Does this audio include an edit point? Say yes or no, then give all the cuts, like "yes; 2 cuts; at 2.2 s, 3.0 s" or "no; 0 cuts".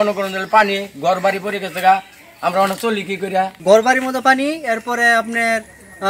yes; 1 cut; at 3.6 s